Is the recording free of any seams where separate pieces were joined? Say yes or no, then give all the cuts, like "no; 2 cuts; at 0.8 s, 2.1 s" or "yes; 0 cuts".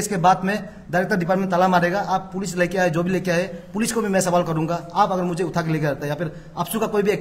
yes; 0 cuts